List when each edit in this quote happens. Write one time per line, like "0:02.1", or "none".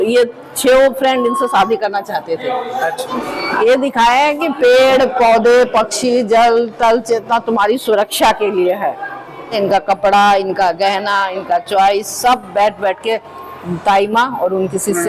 0:03.1
0:09.6